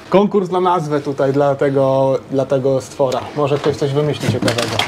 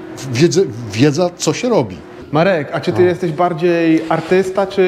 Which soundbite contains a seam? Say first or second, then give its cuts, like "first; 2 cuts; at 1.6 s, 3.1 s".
second; 1 cut; at 2.2 s